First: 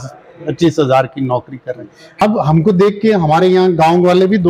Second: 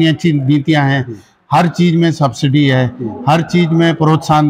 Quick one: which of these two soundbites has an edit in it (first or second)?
first